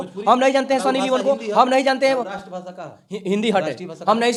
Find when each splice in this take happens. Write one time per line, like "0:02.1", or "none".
none